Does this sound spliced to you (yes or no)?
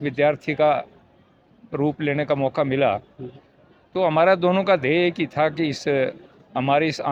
no